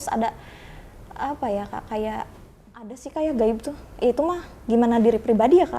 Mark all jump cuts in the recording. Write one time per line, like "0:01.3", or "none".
0:03.0